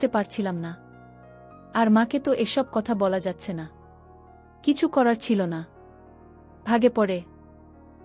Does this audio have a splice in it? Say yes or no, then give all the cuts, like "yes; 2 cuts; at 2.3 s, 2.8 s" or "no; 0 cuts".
yes; 1 cut; at 3.2 s